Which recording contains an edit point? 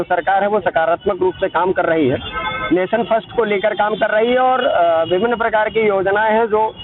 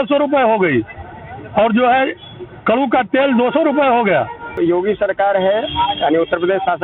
second; 1 cut; at 4.6 s

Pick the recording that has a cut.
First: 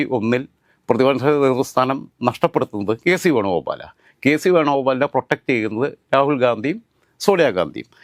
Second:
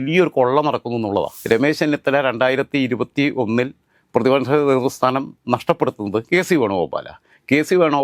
second; 1 cut; at 1.4 s

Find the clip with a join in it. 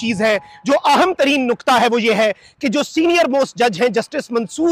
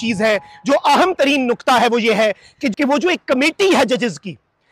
second; 1 cut; at 2.6 s

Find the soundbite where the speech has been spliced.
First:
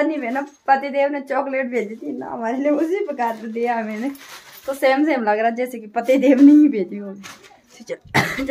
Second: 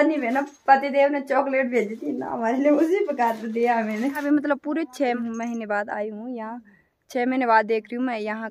second; 2 cuts; at 4.2 s, 5.2 s

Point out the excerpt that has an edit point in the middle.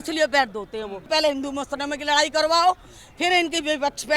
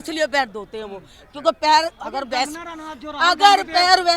first; 1 cut; at 1.0 s

